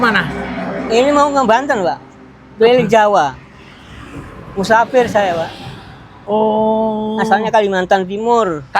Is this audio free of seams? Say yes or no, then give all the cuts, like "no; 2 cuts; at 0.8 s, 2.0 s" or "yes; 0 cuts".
yes; 0 cuts